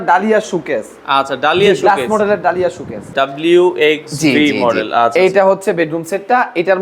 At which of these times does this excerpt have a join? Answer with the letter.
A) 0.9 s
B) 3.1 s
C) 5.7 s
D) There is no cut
B